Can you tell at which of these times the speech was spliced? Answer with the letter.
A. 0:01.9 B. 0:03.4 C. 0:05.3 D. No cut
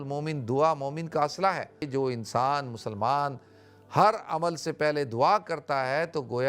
A